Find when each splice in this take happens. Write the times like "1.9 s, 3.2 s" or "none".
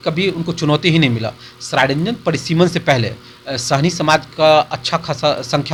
none